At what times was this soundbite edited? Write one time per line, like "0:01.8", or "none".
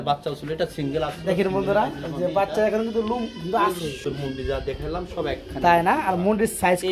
0:04.0